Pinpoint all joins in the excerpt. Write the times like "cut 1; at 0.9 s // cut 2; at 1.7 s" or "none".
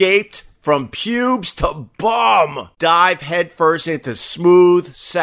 cut 1; at 2.6 s